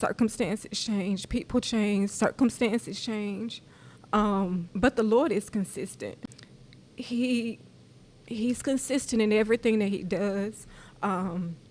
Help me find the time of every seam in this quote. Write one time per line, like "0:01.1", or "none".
0:04.7
0:06.2